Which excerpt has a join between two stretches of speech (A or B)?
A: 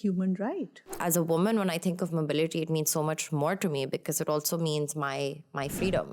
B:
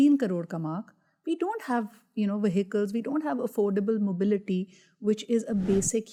A